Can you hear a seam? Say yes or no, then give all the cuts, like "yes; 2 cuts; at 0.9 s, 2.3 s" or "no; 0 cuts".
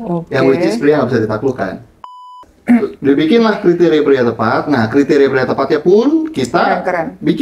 yes; 1 cut; at 2.4 s